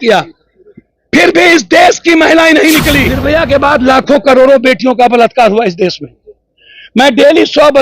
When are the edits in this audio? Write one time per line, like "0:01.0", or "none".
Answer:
0:03.2